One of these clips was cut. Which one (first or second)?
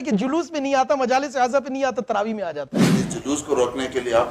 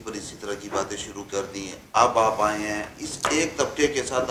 first